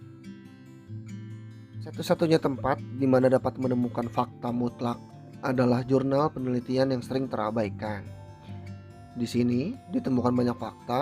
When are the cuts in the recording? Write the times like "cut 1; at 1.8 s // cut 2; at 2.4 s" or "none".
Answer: cut 1; at 2.0 s